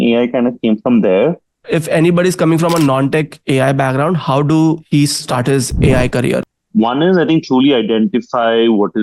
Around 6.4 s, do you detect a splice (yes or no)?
yes